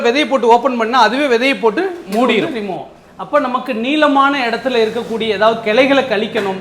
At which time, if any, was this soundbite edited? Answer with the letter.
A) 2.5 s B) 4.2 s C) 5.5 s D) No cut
A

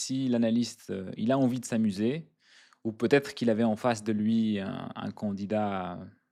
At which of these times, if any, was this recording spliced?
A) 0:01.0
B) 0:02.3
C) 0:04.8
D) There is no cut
D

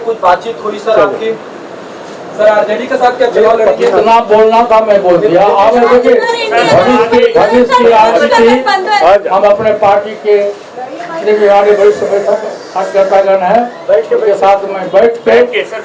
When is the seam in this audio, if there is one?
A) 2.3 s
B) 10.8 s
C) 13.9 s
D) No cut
D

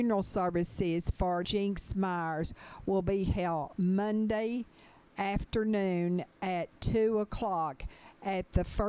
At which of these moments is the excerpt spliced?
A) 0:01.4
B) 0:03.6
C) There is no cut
A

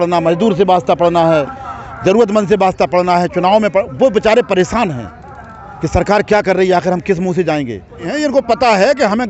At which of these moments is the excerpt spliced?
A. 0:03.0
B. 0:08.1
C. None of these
B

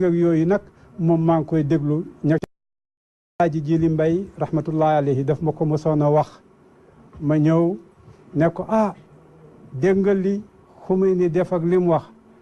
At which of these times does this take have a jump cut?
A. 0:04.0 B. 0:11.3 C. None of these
C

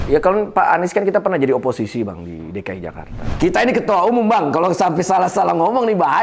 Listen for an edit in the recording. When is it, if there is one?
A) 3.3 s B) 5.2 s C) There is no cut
A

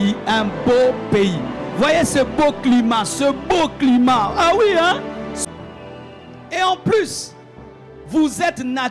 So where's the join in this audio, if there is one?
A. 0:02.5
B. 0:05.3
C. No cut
B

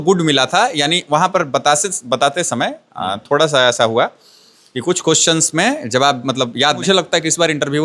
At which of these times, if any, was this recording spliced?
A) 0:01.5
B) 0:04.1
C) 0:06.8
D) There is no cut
C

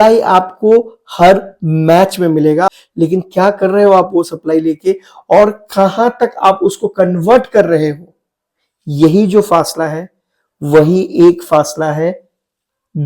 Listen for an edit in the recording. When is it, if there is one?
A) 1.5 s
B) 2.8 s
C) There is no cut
B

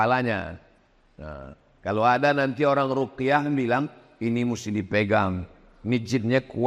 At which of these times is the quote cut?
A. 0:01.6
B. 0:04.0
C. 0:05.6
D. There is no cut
D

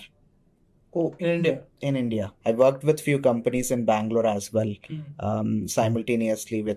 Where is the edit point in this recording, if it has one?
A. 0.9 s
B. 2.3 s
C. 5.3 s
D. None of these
B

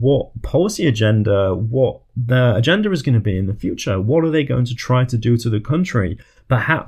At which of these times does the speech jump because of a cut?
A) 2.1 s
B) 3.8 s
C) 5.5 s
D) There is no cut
A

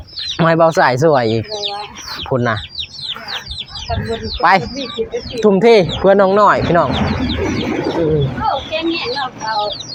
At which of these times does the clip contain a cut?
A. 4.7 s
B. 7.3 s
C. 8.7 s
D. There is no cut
D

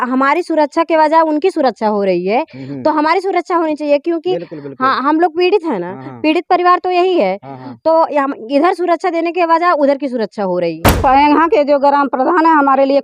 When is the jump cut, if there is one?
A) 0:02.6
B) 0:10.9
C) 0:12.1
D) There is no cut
B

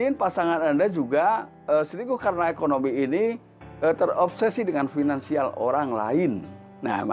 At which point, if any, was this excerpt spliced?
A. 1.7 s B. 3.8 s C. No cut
C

